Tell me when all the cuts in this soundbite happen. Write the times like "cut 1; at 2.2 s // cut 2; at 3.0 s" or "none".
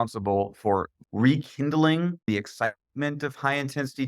cut 1; at 1.0 s // cut 2; at 2.3 s